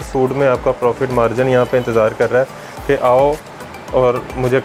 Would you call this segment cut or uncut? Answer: uncut